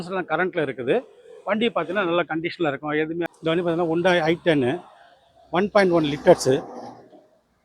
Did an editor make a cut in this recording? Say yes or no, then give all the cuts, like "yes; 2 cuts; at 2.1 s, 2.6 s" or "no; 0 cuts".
yes; 1 cut; at 3.2 s